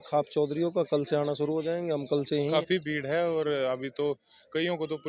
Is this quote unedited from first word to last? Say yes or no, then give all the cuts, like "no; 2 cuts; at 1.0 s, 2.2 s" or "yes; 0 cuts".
no; 1 cut; at 2.5 s